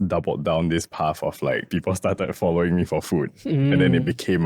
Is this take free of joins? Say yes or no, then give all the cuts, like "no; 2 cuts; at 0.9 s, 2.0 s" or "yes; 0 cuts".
no; 1 cut; at 1.7 s